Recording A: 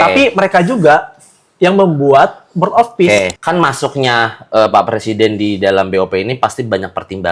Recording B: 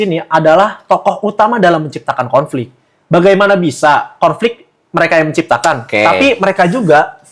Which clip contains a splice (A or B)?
A